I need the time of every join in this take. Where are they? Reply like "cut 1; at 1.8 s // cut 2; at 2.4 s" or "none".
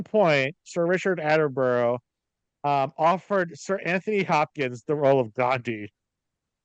none